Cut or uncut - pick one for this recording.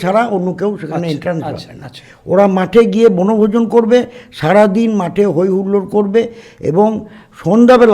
uncut